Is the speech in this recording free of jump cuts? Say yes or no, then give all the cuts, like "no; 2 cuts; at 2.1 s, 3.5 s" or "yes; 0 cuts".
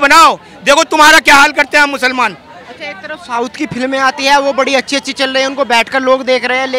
yes; 0 cuts